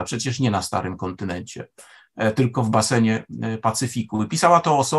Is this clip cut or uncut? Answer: uncut